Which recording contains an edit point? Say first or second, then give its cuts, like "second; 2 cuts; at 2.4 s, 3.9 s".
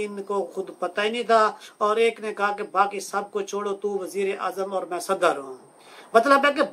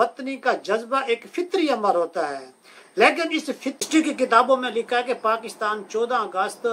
second; 1 cut; at 3.8 s